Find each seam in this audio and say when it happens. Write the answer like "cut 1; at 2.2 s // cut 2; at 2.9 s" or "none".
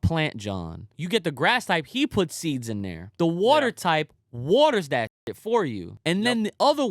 cut 1; at 1.0 s // cut 2; at 3.0 s // cut 3; at 5.9 s